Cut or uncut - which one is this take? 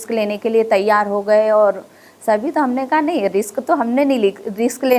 uncut